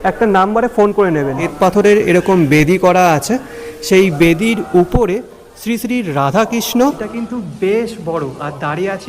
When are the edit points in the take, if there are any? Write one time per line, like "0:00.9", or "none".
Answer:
0:01.5
0:07.1